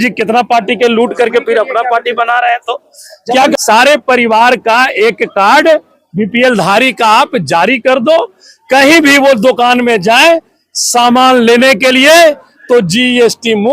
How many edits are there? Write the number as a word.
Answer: one